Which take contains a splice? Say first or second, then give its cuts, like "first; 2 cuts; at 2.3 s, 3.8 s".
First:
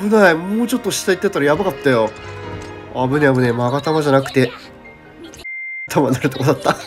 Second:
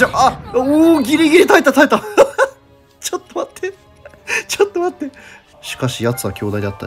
second; 1 cut; at 5.6 s